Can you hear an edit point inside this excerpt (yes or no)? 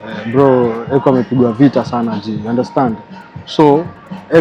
no